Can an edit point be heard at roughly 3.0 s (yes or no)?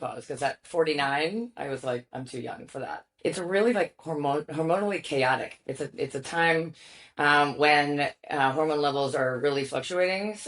yes